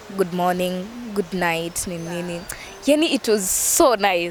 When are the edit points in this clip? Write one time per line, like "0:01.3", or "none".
none